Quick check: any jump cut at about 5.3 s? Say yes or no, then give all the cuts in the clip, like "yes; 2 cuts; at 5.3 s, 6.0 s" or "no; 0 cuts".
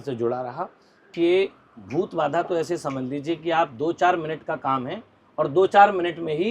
no; 1 cut; at 1.1 s